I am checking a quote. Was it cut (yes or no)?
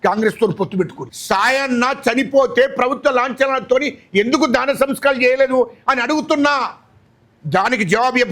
yes